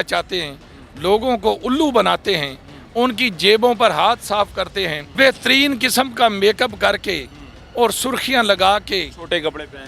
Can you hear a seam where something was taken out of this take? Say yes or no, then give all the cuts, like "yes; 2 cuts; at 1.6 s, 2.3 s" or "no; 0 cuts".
yes; 1 cut; at 5.0 s